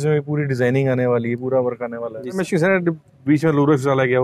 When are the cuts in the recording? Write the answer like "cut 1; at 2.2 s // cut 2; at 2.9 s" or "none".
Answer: cut 1; at 2.4 s